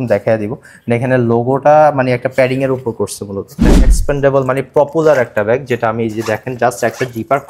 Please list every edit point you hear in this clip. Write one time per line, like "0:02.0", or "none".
0:03.9